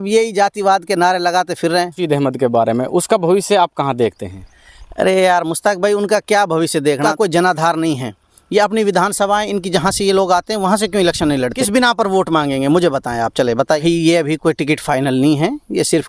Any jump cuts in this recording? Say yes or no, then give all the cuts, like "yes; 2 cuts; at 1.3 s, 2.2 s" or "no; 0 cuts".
yes; 4 cuts; at 2.0 s, 7.1 s, 11.6 s, 13.8 s